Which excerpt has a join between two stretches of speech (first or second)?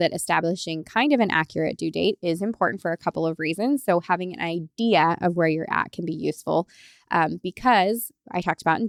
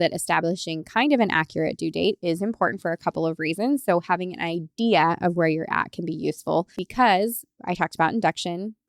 second